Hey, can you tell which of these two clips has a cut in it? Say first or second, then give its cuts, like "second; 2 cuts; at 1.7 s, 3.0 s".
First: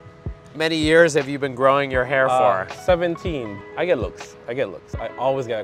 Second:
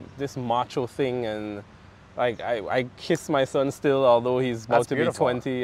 first; 1 cut; at 3.5 s